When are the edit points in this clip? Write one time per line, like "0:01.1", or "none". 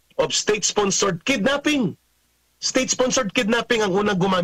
none